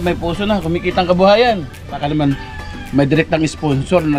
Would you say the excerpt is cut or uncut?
cut